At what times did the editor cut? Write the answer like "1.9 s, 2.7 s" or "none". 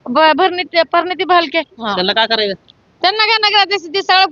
1.8 s